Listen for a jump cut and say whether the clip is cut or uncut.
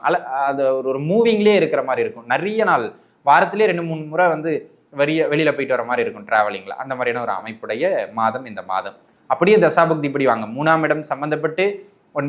uncut